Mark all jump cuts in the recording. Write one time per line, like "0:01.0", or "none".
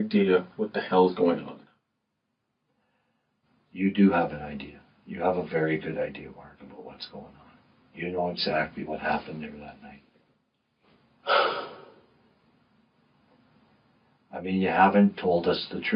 none

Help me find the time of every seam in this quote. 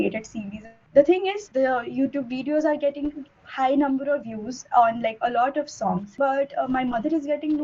0:01.4
0:06.2

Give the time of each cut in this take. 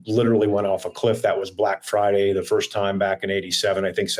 none

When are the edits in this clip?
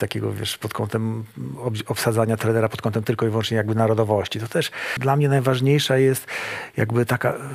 0:04.9

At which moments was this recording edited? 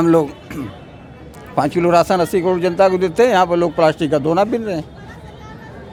none

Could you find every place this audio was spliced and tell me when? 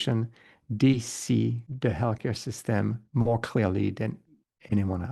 none

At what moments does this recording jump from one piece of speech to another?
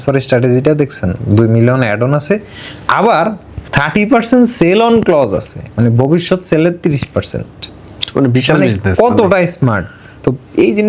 none

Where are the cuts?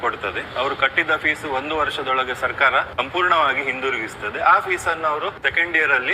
0:02.9
0:05.4

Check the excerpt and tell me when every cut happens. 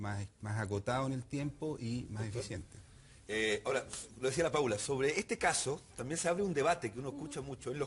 0:05.1

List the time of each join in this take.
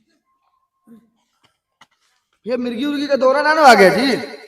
none

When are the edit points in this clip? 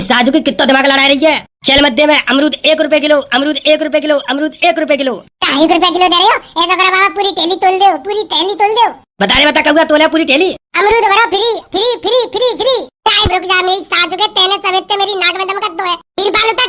0:13.3

